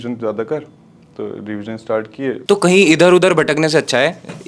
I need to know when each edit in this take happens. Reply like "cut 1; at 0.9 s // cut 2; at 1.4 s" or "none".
cut 1; at 2.4 s

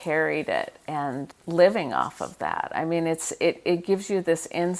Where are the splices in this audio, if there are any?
cut 1; at 1.3 s

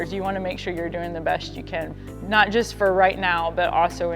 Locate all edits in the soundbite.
cut 1; at 1.9 s

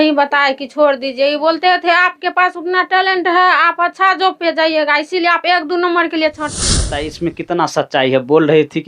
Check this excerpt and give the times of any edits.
cut 1; at 6.6 s

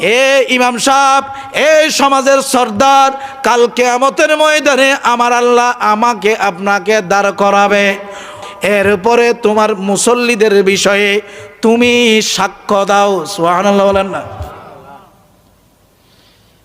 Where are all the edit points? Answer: cut 1; at 8.3 s

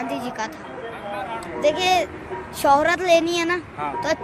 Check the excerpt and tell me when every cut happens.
cut 1; at 1.5 s

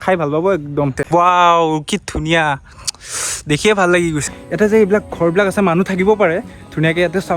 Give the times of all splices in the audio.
cut 1; at 1.0 s // cut 2; at 4.3 s

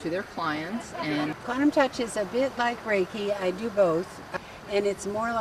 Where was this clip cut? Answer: cut 1; at 1.3 s // cut 2; at 4.2 s

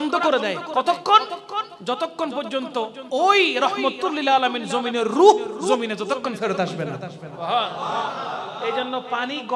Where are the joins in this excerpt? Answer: none

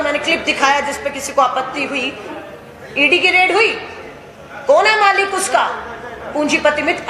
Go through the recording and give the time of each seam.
none

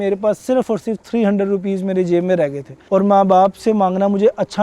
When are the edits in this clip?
cut 1; at 2.7 s

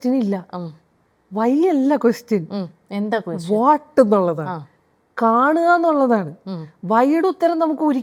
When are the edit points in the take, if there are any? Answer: none

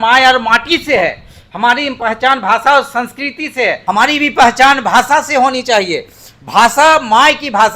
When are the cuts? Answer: cut 1; at 3.8 s

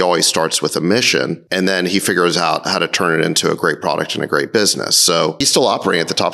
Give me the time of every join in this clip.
cut 1; at 1.4 s // cut 2; at 5.4 s

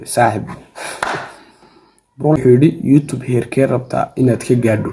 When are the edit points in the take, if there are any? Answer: cut 1; at 2.4 s

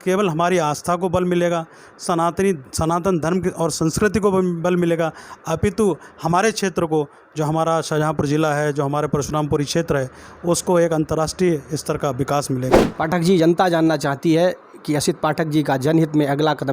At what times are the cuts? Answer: cut 1; at 12.9 s

